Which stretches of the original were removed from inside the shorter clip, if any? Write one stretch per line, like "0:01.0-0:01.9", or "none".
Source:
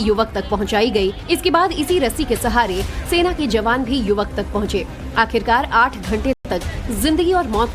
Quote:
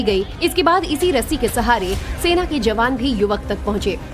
none